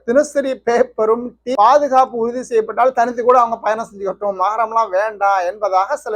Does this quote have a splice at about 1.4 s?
yes; 1 cut; at 1.4 s

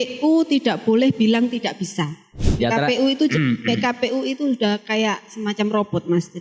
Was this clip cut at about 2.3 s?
yes; 1 cut; at 2.3 s

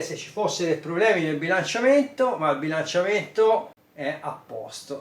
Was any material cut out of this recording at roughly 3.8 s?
yes; 1 cut; at 3.8 s

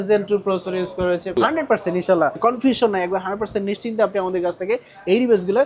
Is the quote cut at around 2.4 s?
yes; 2 cuts; at 1.4 s, 2.4 s

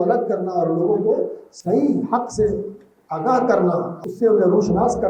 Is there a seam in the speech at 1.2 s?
no; 1 cut; at 3.9 s

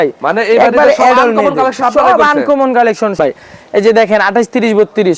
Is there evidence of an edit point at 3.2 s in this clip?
yes; 1 cut; at 3.2 s

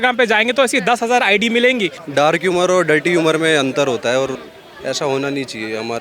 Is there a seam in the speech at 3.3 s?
no; 2 cuts; at 2.0 s, 4.5 s

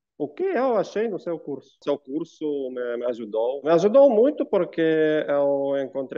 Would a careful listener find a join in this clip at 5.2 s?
no; 2 cuts; at 1.7 s, 3.7 s

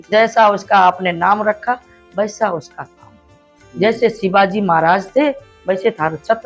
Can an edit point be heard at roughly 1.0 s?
no; 0 cuts

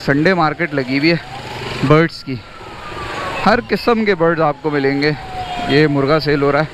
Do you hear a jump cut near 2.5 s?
no; 0 cuts

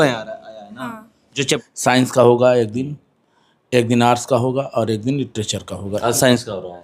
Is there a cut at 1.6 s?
yes; 1 cut; at 1.6 s

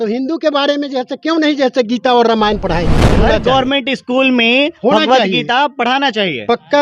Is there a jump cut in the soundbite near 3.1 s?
yes; 1 cut; at 3.1 s

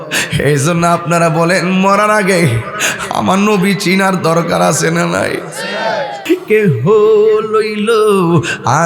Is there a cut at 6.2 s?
yes; 1 cut; at 6.2 s

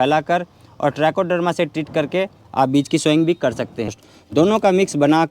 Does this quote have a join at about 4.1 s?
yes; 1 cut; at 4.1 s

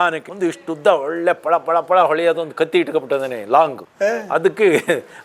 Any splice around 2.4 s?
no; 1 cut; at 3.8 s

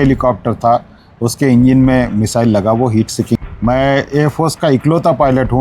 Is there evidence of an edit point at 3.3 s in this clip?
yes; 1 cut; at 3.3 s

